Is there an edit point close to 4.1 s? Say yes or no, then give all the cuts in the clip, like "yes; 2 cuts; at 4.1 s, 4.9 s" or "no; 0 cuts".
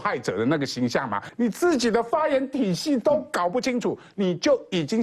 no; 1 cut; at 1.2 s